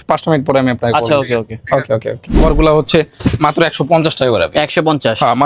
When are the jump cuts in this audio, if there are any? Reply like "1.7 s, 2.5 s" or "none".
2.4 s